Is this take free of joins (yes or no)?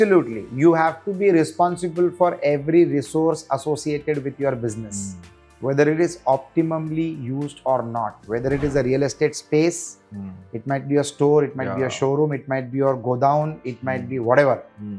yes